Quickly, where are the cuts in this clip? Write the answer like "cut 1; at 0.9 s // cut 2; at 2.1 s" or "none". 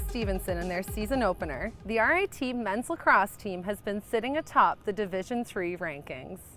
cut 1; at 3.0 s